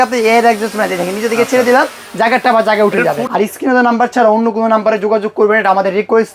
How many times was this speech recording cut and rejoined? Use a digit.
1